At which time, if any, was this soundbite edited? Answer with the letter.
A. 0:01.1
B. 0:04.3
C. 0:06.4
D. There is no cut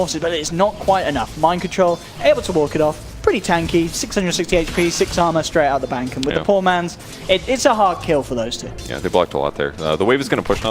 A